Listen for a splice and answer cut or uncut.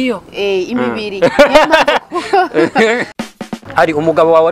cut